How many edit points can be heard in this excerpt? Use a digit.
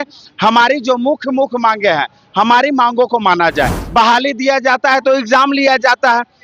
1